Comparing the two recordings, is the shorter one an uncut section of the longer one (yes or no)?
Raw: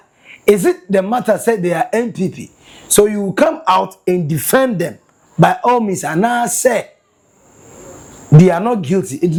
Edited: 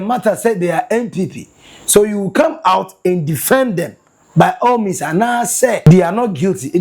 no